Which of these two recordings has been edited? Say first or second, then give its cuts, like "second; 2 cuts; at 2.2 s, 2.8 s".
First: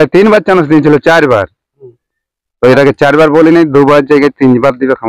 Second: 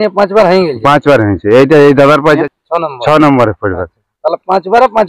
second; 1 cut; at 2.4 s